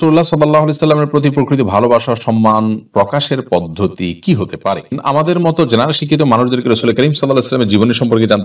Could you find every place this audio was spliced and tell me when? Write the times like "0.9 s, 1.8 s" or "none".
5.0 s